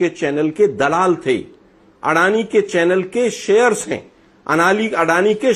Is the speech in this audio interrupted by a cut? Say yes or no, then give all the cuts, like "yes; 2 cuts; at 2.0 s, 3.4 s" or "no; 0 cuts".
no; 0 cuts